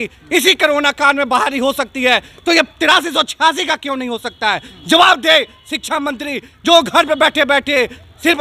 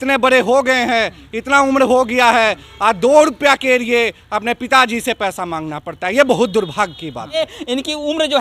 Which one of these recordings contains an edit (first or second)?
second